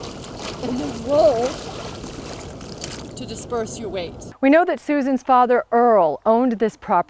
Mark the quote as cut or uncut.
cut